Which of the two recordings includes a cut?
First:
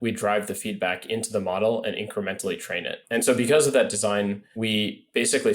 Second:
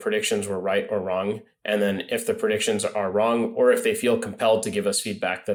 first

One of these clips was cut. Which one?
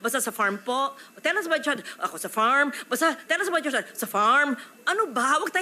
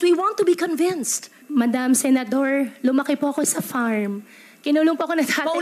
second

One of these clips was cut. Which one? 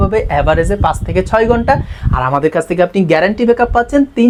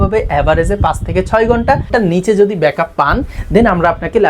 second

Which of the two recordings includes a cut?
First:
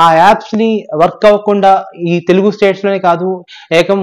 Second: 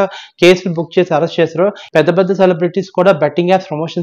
second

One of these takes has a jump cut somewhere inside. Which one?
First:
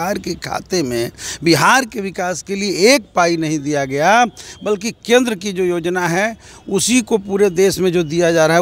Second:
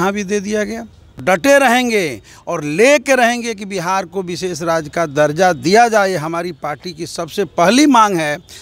second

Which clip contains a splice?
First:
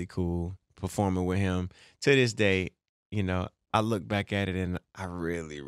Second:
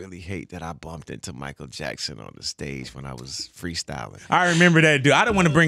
second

